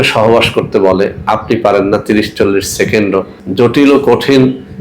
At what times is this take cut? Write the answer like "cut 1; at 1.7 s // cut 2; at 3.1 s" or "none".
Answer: cut 1; at 3.4 s